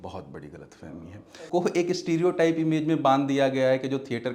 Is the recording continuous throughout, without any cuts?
no; 1 cut; at 1.4 s

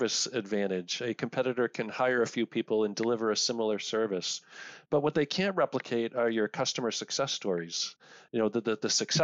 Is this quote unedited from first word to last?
yes; 0 cuts

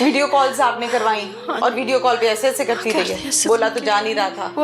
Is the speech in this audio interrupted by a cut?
no; 0 cuts

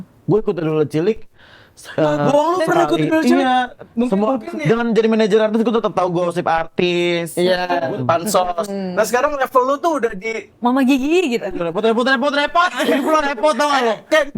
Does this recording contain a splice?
yes; 3 cuts; at 3.8 s, 7.9 s, 11.5 s

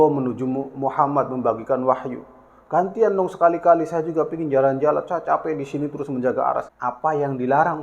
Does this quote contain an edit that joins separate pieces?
yes; 1 cut; at 6.7 s

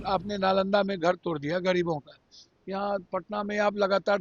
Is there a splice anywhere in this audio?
no; 0 cuts

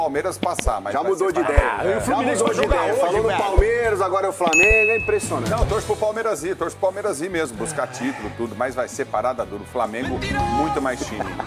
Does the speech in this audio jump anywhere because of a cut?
no; 0 cuts

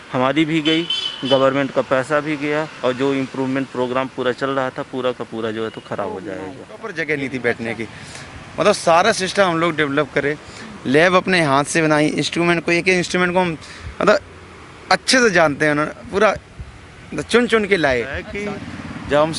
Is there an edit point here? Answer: yes; 2 cuts; at 6.9 s, 18.3 s

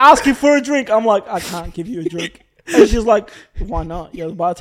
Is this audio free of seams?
yes; 0 cuts

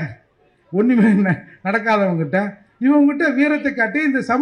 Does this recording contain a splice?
no; 0 cuts

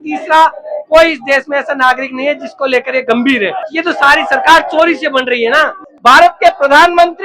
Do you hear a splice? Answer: yes; 2 cuts; at 3.7 s, 5.8 s

